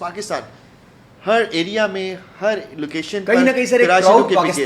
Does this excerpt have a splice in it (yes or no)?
no